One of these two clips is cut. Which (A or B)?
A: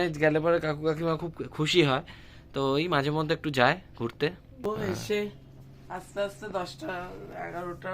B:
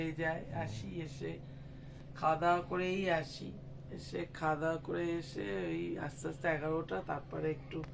A